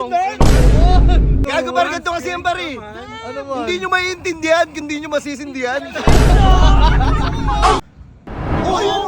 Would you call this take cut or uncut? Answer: cut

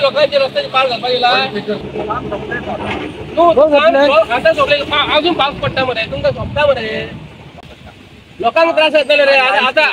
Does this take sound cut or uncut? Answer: cut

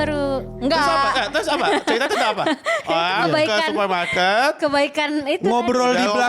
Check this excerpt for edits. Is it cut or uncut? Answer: uncut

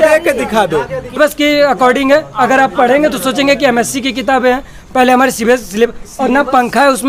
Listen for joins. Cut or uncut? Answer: cut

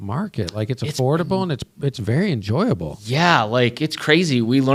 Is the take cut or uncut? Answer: uncut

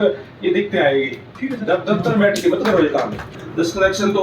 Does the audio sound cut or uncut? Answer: cut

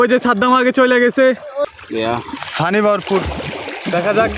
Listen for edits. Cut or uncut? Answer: cut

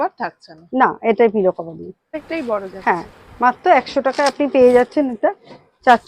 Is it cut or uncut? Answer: cut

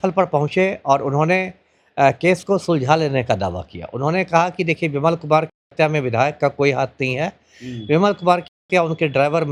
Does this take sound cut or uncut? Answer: uncut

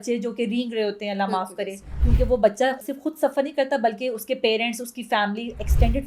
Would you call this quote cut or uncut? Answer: cut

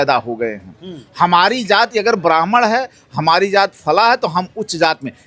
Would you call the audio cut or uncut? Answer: uncut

